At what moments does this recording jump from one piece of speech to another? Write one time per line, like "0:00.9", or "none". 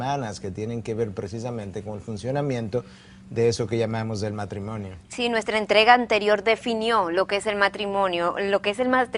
0:05.3